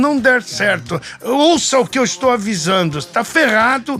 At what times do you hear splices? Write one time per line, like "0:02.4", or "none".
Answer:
none